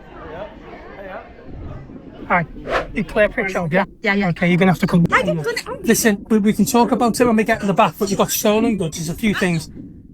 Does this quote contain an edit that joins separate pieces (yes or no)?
yes